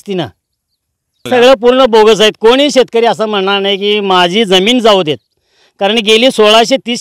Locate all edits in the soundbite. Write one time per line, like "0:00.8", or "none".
0:01.3